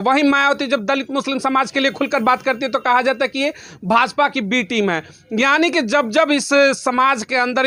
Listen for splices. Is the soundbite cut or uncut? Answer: uncut